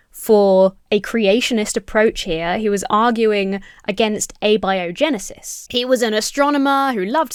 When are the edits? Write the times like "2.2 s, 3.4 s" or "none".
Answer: none